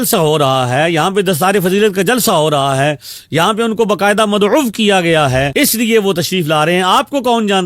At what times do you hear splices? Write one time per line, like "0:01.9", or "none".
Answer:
none